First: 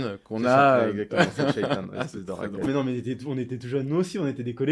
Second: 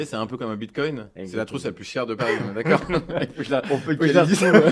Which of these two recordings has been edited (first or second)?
first